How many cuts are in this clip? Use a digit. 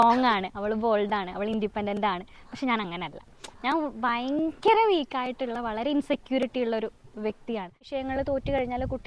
1